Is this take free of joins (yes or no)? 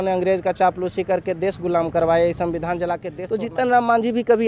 no